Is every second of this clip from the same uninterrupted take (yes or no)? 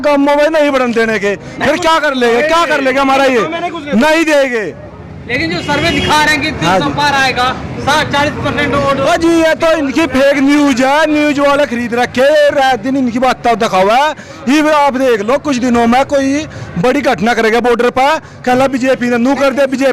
yes